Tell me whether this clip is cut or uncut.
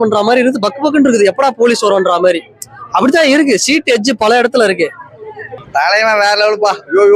cut